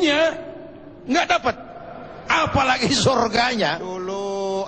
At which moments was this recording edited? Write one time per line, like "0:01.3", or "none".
0:03.4